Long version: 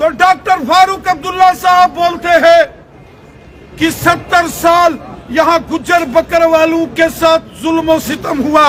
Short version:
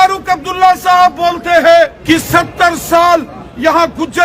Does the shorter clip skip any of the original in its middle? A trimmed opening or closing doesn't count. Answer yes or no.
yes